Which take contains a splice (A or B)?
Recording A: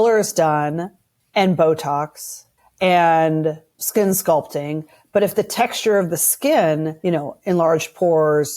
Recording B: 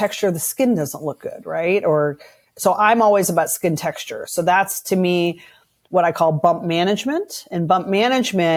A